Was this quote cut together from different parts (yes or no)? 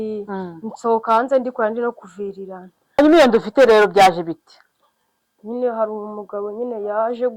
yes